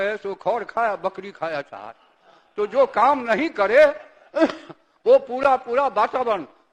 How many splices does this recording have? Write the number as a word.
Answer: zero